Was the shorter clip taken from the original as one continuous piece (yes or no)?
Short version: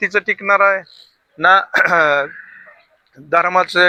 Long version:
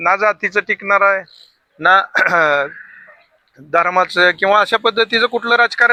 yes